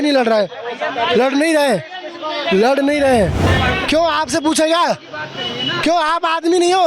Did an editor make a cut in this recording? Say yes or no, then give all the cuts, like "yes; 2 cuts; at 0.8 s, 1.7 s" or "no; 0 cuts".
yes; 1 cut; at 3.4 s